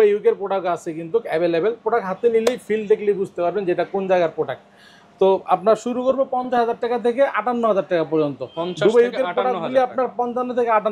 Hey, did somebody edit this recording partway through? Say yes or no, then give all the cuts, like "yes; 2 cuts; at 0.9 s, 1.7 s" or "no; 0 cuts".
no; 0 cuts